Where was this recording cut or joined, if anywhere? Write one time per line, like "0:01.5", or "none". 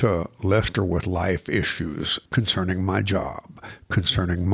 0:02.2